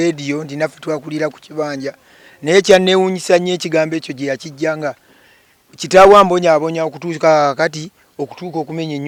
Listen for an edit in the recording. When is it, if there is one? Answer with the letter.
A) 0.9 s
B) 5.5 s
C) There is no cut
C